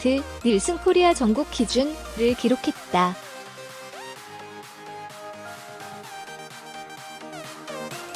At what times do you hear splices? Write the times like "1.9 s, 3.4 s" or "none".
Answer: 3.7 s